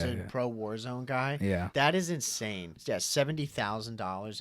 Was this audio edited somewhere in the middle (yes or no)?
yes